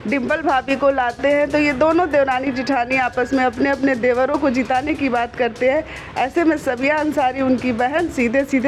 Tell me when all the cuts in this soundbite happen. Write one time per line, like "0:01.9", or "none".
none